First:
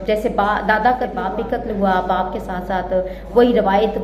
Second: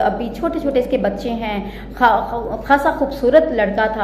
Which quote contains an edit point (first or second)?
first